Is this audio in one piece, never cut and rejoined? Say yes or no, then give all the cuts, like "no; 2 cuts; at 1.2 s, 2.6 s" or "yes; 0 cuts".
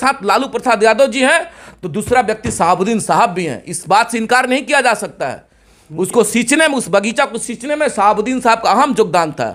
yes; 0 cuts